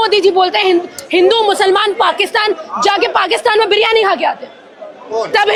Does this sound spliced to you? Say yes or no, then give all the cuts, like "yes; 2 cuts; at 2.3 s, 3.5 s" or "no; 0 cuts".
no; 0 cuts